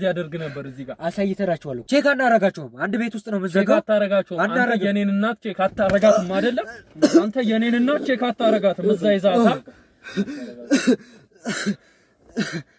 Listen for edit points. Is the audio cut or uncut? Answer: cut